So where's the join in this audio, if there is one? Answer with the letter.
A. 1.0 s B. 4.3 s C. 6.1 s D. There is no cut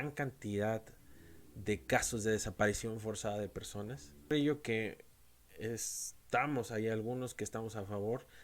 B